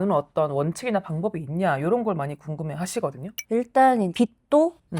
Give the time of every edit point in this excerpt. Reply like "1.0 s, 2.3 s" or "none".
3.3 s